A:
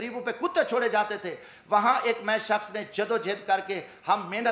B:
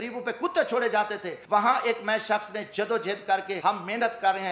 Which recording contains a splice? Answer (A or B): B